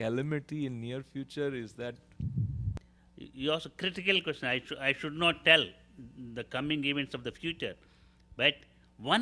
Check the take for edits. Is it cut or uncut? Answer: cut